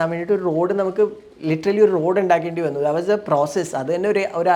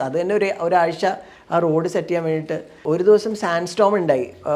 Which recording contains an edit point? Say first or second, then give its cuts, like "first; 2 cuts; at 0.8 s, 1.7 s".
second; 1 cut; at 2.7 s